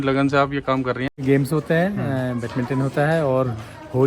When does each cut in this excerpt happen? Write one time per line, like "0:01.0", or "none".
0:01.2